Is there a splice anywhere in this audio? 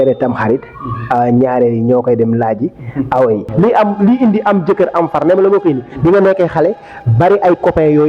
yes; 1 cut; at 3.5 s

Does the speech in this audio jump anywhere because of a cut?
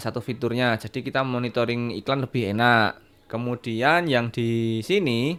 no; 0 cuts

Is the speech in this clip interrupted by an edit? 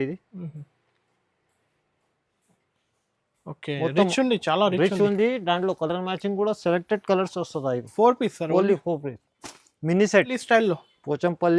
yes; 1 cut; at 10.4 s

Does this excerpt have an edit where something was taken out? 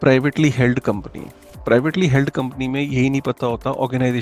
no; 0 cuts

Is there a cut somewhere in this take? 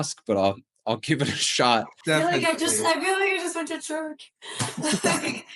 yes; 1 cut; at 1.9 s

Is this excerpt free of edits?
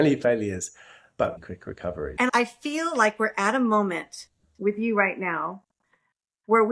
no; 1 cut; at 1.8 s

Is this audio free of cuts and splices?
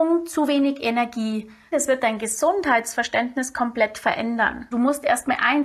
no; 2 cuts; at 1.7 s, 4.7 s

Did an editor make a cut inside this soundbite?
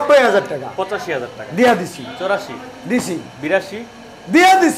no; 0 cuts

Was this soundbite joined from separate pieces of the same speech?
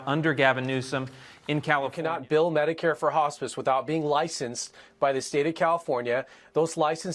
yes; 1 cut; at 2.0 s

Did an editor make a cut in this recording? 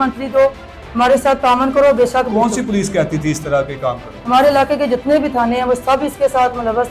no; 0 cuts

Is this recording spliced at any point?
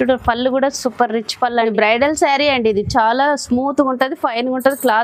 yes; 1 cut; at 1.7 s

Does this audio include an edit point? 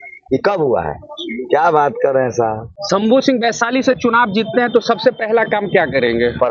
yes; 1 cut; at 2.7 s

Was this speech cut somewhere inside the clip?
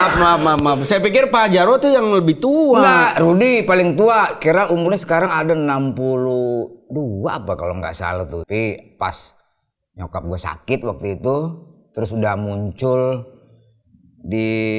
yes; 1 cut; at 8.4 s

